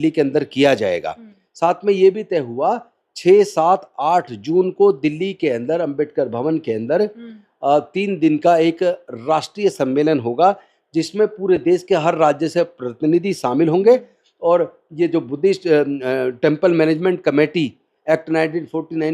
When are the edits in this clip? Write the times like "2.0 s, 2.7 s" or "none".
none